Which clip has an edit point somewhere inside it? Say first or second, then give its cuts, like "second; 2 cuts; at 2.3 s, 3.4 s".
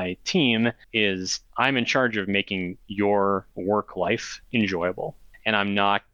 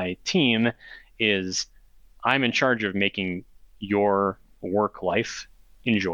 first; 4 cuts; at 1.0 s, 2.8 s, 3.8 s, 5.3 s